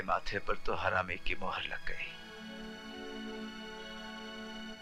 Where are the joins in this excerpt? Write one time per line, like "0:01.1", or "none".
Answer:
none

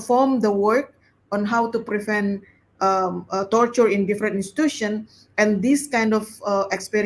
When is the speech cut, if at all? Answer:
none

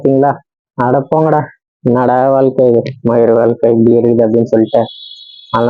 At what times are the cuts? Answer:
none

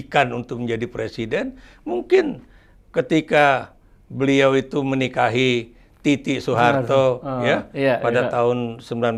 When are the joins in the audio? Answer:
none

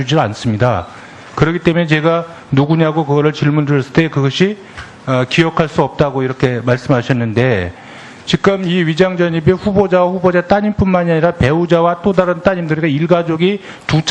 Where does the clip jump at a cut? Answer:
0:08.7

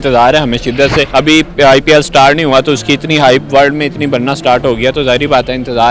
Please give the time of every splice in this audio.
0:01.1

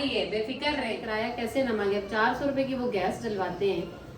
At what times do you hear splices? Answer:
0:01.0

